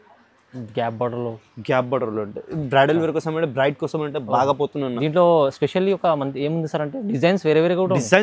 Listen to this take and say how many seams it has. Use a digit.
0